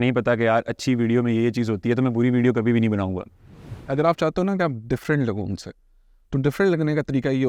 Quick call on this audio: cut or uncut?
cut